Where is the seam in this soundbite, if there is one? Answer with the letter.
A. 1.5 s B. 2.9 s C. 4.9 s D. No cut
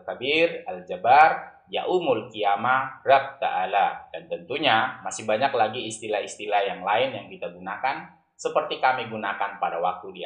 D